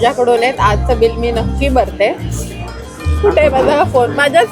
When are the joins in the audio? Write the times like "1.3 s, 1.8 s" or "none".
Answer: none